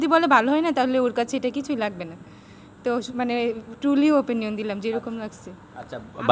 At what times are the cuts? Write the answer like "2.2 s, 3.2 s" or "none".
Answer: none